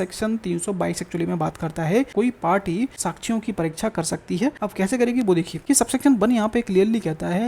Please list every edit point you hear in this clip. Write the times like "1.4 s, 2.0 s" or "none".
2.1 s, 3.0 s, 4.6 s, 5.5 s